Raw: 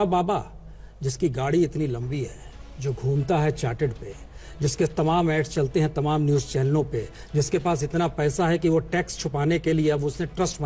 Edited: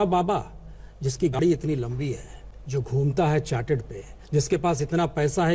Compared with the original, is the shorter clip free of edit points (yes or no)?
no